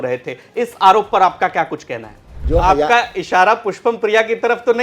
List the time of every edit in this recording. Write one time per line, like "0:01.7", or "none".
0:02.3